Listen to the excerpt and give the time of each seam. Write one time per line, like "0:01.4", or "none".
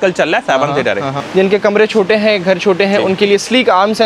0:01.1